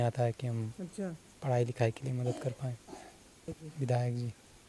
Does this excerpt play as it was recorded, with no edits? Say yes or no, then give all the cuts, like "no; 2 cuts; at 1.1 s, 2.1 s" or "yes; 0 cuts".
no; 1 cut; at 3.6 s